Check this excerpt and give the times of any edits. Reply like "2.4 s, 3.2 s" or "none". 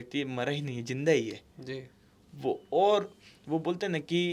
none